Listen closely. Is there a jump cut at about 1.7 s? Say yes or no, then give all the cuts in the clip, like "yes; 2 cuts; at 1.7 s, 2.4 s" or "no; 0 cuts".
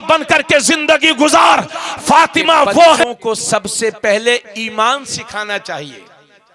no; 1 cut; at 3.0 s